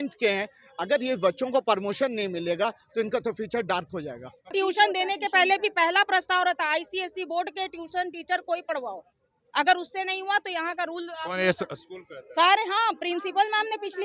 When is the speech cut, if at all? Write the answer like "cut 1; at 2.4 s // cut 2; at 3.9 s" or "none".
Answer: cut 1; at 4.5 s